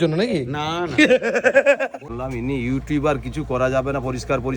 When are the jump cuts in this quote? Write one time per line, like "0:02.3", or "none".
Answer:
0:02.0